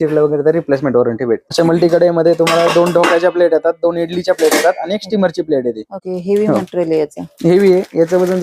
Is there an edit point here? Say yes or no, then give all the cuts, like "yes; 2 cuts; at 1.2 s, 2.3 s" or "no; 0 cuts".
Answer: yes; 2 cuts; at 1.5 s, 5.9 s